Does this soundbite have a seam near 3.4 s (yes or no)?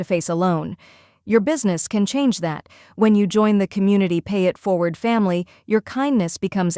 no